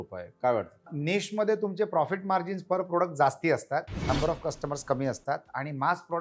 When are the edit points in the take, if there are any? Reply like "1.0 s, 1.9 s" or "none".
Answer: 0.9 s